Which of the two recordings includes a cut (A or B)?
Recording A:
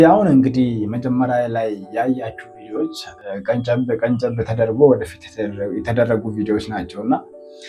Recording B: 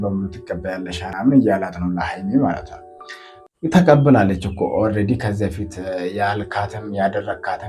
B